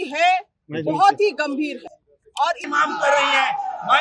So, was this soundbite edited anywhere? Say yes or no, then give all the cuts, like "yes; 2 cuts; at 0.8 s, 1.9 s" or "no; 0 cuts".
yes; 1 cut; at 2.6 s